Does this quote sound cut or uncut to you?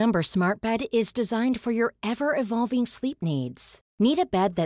uncut